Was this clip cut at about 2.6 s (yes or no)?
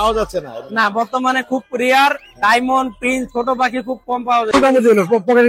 no